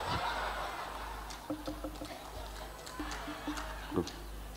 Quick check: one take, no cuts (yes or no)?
no